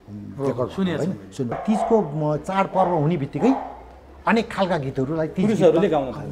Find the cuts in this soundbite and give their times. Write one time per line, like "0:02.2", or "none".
0:01.5